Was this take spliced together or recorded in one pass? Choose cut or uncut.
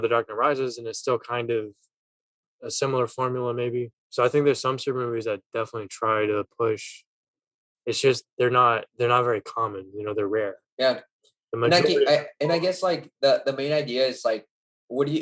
cut